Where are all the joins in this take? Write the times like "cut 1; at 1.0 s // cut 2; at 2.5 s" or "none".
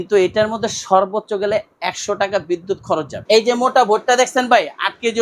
cut 1; at 3.1 s